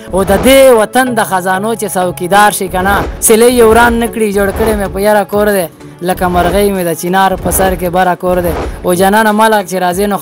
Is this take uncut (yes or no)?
no